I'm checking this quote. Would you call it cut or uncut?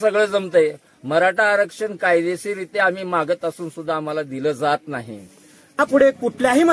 cut